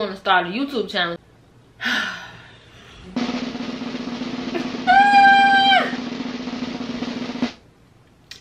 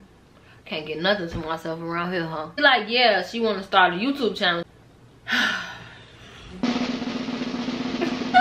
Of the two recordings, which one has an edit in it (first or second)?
second